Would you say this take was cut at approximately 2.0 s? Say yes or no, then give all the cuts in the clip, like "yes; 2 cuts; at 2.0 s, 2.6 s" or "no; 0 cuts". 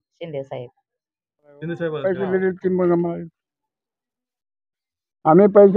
yes; 1 cut; at 2.0 s